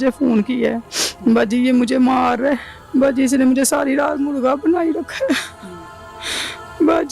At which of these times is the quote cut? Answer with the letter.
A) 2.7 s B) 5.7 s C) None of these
A